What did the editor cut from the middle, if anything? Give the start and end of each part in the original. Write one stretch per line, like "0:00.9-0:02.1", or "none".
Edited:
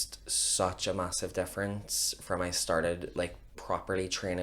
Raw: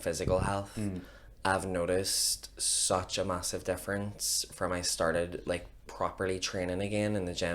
none